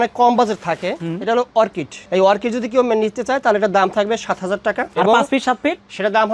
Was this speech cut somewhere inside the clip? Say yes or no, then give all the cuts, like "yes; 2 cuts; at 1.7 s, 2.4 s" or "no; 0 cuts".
yes; 2 cuts; at 1.9 s, 4.9 s